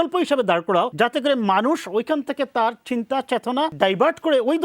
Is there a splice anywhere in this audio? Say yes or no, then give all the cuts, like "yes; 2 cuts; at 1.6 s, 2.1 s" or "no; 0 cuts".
yes; 2 cuts; at 0.9 s, 3.7 s